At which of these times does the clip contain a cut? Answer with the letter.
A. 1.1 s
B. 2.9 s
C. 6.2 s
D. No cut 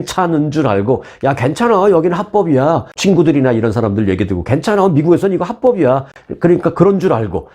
B